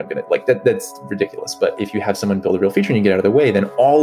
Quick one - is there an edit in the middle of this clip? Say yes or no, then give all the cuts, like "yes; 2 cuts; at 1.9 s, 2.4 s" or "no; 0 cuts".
yes; 1 cut; at 1.8 s